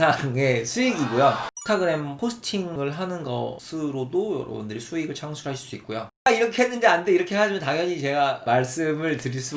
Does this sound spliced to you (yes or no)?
yes